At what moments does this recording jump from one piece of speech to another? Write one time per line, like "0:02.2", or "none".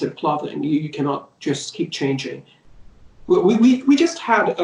0:02.7